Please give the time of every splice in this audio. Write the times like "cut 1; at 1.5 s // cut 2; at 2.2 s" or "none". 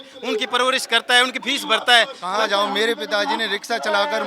cut 1; at 2.2 s